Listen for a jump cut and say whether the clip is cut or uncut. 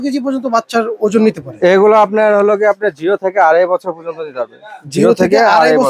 uncut